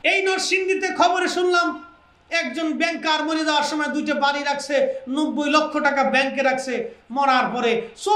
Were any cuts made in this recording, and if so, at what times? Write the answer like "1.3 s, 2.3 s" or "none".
none